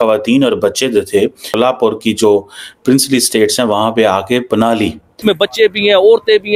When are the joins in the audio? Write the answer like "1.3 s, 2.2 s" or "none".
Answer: 1.5 s, 5.2 s